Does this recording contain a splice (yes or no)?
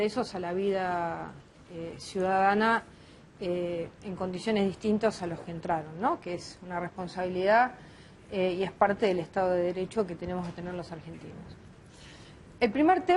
yes